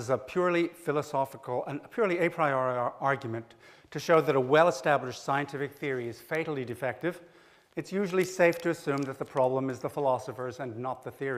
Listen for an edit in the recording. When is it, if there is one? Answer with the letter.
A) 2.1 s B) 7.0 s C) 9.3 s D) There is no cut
B